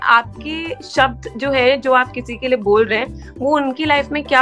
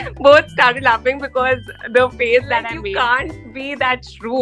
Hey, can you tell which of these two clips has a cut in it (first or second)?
second